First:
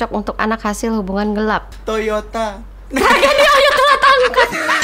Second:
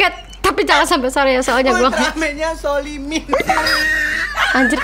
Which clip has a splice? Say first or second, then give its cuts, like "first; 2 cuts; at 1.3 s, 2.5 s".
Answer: first; 1 cut; at 1.7 s